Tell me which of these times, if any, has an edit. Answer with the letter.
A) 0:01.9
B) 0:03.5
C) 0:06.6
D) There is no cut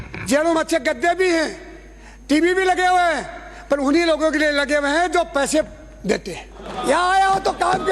C